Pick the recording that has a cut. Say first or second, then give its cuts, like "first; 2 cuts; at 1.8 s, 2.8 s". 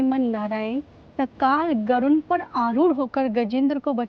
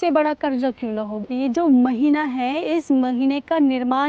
second; 1 cut; at 1.2 s